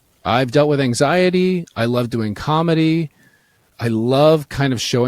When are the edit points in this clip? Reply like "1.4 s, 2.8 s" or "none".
3.6 s